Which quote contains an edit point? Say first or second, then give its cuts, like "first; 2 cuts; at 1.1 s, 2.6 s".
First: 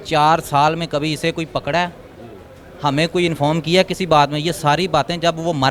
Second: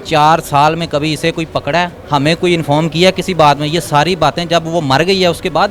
second; 1 cut; at 2.0 s